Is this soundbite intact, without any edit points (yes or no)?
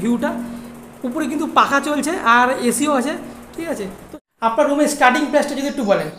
no